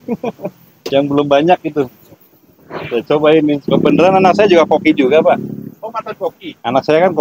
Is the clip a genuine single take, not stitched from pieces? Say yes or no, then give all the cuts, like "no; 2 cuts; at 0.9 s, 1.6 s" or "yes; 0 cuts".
no; 1 cut; at 3.7 s